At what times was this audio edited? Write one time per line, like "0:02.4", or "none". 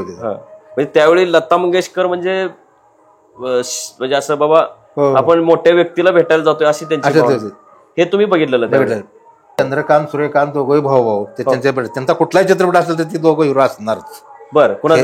0:09.6